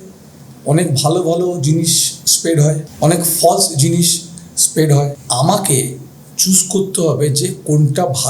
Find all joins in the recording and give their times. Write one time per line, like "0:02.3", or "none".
0:02.9
0:05.2